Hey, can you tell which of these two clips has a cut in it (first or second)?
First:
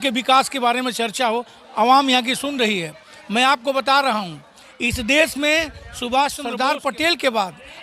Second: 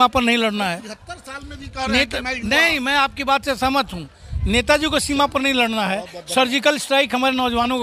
first